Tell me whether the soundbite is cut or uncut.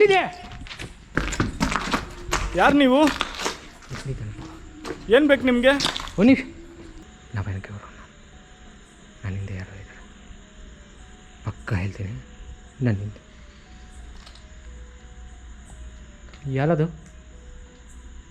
cut